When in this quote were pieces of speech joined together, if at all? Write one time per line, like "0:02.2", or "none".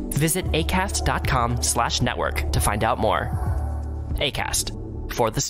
none